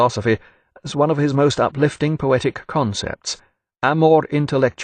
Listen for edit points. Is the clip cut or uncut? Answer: uncut